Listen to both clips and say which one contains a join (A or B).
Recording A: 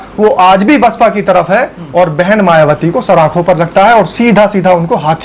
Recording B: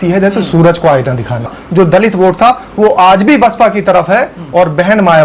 B